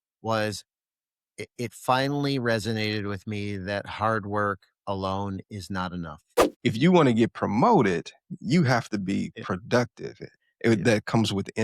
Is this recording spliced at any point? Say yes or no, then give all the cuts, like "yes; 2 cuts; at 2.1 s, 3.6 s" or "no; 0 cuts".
yes; 1 cut; at 6.6 s